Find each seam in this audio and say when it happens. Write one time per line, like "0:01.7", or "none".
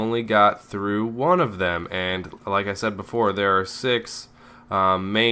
0:03.5